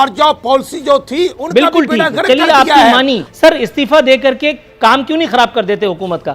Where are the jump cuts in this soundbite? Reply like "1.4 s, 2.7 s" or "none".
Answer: 3.2 s